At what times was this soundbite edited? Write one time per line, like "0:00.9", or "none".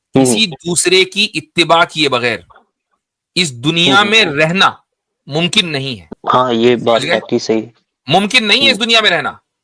0:06.0